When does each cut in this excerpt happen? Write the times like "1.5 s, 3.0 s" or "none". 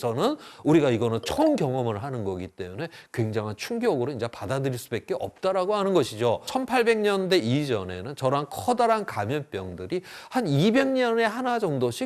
6.6 s